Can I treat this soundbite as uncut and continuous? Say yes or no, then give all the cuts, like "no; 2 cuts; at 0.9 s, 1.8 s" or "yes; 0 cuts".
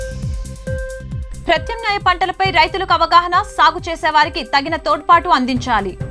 no; 1 cut; at 1.2 s